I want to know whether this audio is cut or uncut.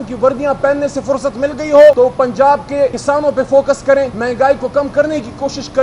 cut